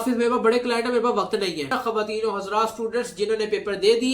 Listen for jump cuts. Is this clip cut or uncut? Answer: cut